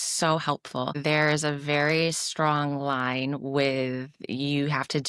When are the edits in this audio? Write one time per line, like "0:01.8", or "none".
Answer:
0:00.9